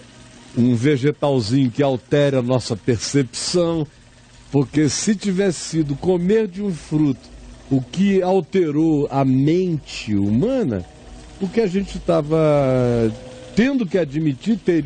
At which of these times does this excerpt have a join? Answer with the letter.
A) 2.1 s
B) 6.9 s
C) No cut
C